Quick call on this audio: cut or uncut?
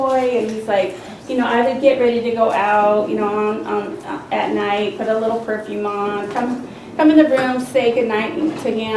uncut